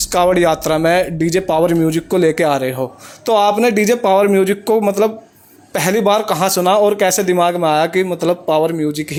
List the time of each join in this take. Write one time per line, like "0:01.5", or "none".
none